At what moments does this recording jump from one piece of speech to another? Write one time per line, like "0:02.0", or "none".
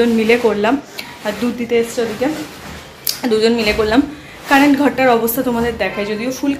none